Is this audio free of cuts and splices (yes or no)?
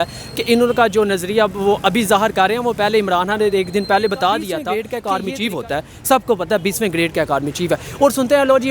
no